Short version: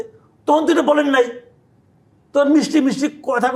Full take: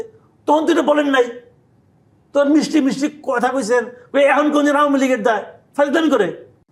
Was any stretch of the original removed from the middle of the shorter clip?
no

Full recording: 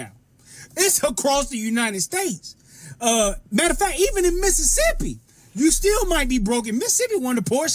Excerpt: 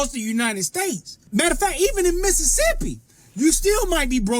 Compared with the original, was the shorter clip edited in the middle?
yes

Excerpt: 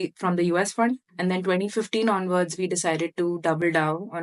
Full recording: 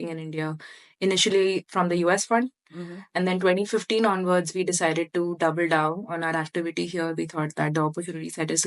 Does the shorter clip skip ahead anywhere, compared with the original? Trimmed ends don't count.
yes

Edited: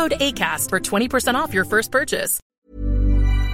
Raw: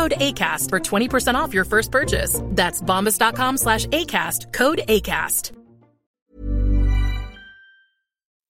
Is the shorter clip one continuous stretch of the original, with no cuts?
no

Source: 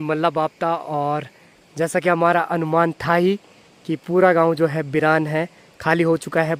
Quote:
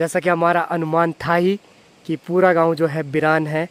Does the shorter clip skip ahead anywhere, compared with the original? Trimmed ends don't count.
no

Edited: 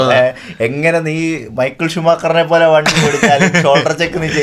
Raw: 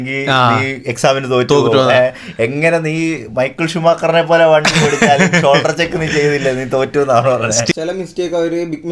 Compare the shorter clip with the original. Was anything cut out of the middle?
no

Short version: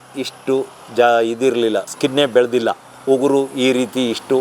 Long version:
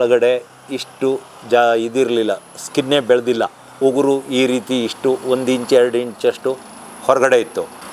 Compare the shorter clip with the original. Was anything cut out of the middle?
yes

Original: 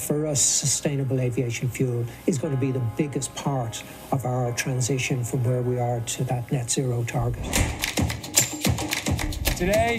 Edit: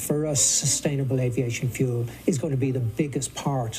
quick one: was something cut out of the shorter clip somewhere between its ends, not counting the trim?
no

